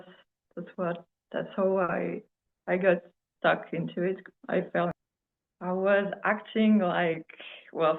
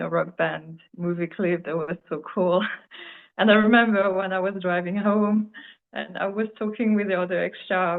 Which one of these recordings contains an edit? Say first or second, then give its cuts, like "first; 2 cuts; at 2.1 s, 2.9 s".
first; 1 cut; at 4.9 s